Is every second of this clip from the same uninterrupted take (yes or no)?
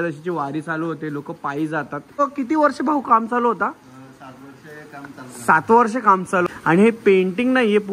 no